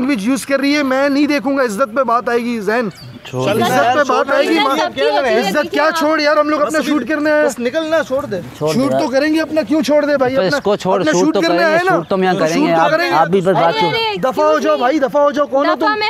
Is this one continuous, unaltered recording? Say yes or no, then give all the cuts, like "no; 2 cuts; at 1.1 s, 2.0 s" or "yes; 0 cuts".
yes; 0 cuts